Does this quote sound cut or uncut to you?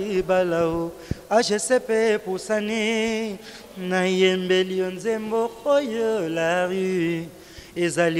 uncut